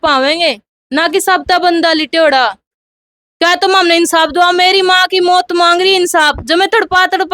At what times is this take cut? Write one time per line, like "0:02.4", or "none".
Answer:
0:02.9